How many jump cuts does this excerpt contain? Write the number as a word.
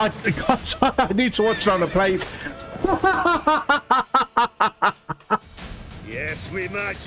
zero